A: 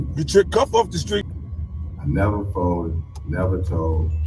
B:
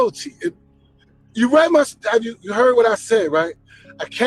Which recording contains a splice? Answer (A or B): A